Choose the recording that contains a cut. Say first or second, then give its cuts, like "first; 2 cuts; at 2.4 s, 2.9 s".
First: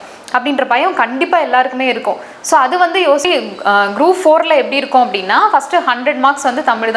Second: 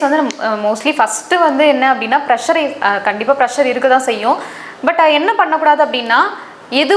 first; 1 cut; at 3.2 s